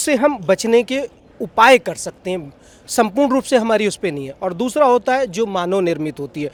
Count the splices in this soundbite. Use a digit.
0